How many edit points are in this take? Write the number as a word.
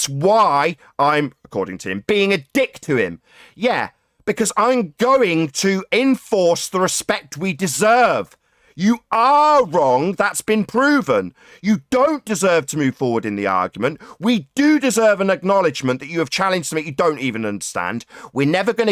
zero